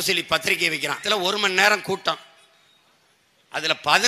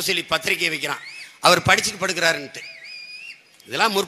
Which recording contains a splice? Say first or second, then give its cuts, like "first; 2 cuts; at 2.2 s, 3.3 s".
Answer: first; 1 cut; at 1.0 s